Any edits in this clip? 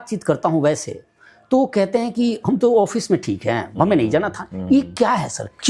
no; 0 cuts

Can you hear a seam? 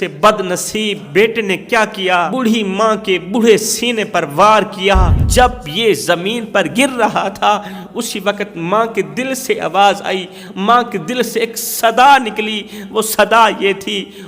yes; 3 cuts; at 1.0 s, 2.3 s, 5.2 s

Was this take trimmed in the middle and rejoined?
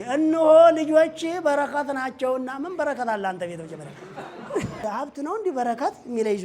yes; 1 cut; at 4.8 s

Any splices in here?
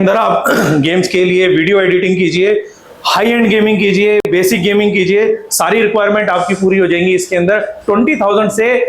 no; 0 cuts

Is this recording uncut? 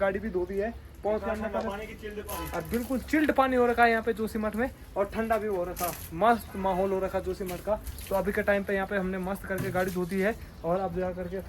yes; 0 cuts

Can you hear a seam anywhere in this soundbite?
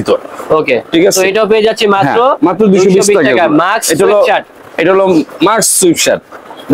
no; 0 cuts

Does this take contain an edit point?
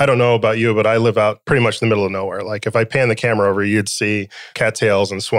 yes; 2 cuts; at 1.4 s, 4.4 s

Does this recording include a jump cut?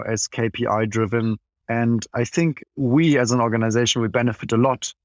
yes; 2 cuts; at 1.5 s, 2.7 s

